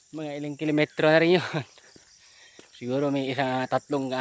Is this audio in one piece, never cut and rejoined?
yes; 0 cuts

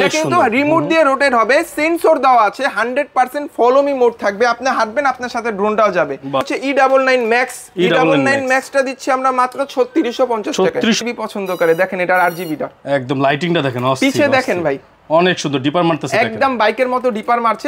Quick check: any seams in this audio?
yes; 2 cuts; at 6.5 s, 11.0 s

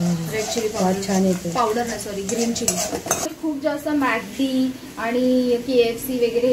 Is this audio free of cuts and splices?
no; 1 cut; at 3.3 s

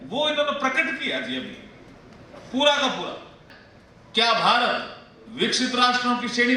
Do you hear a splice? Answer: yes; 1 cut; at 3.4 s

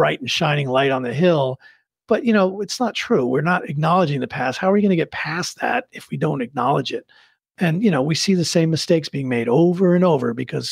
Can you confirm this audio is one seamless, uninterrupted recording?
no; 1 cut; at 1.9 s

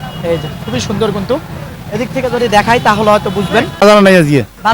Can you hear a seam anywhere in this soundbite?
yes; 1 cut; at 3.8 s

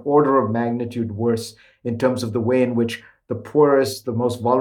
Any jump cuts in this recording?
no; 0 cuts

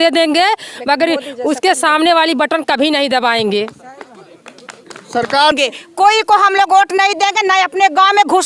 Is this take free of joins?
no; 1 cut; at 5.5 s

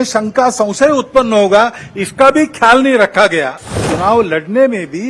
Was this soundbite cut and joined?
yes; 1 cut; at 3.8 s

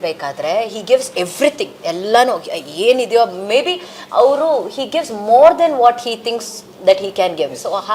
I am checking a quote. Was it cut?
no; 0 cuts

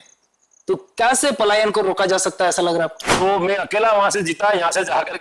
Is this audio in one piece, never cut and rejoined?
no; 1 cut; at 3.0 s

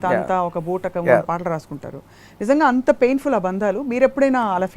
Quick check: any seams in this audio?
no; 0 cuts

